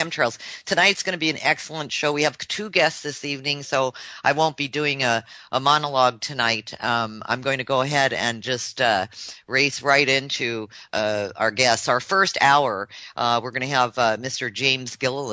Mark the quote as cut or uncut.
uncut